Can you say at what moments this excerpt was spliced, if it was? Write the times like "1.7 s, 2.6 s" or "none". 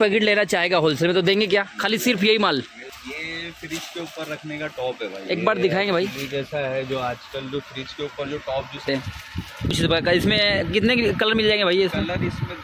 2.9 s, 8.8 s